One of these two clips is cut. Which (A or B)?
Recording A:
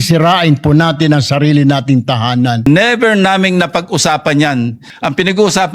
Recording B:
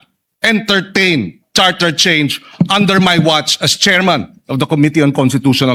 A